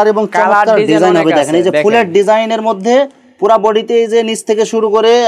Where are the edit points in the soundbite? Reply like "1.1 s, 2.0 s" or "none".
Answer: none